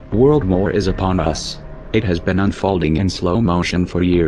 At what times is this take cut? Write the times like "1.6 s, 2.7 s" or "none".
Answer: 1.1 s